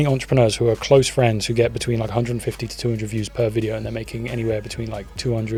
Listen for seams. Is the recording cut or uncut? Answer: uncut